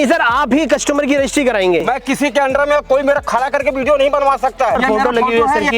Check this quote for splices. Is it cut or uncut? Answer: cut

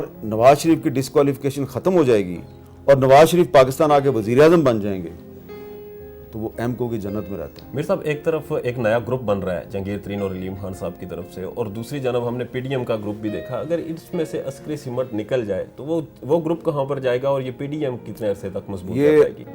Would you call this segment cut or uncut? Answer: uncut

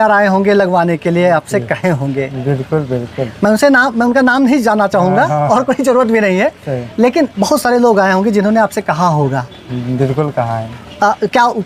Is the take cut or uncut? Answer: uncut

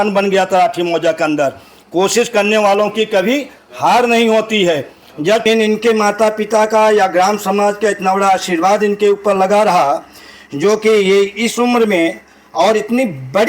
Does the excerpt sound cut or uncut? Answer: cut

